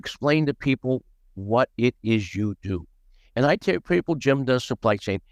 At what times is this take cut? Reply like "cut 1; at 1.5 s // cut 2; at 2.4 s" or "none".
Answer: none